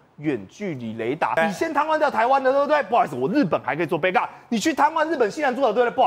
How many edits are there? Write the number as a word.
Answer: one